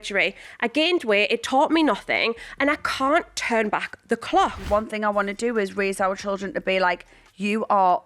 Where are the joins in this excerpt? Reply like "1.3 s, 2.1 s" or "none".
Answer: 4.7 s